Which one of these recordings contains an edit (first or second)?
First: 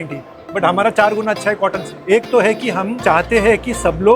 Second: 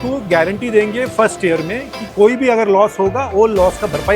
first